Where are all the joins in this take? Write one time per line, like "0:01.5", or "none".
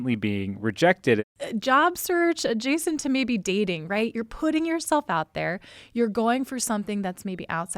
0:01.2

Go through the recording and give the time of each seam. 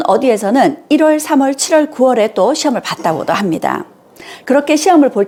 none

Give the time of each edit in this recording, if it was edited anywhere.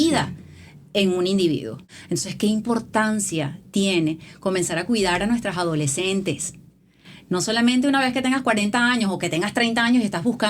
0:01.8

